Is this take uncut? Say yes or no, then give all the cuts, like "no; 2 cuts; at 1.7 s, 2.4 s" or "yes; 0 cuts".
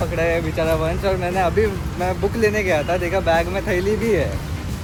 yes; 0 cuts